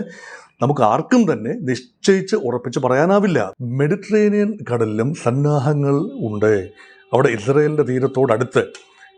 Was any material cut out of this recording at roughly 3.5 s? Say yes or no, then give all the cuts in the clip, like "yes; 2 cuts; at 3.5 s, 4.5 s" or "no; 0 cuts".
yes; 1 cut; at 3.5 s